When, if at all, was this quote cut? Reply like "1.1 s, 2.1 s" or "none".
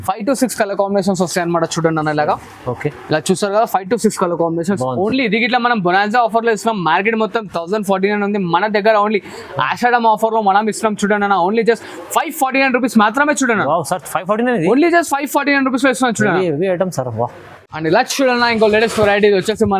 none